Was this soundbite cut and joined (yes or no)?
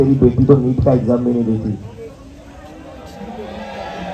no